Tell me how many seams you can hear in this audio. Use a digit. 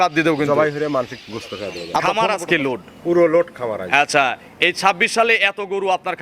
1